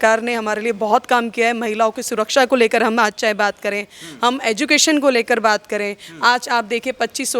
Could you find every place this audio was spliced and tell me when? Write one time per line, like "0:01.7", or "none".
none